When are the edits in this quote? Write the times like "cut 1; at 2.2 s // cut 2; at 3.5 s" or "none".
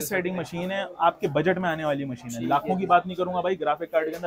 none